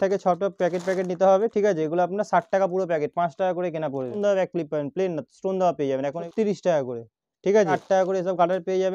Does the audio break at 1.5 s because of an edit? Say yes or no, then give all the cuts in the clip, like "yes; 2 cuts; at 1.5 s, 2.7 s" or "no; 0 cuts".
no; 3 cuts; at 4.2 s, 6.3 s, 7.8 s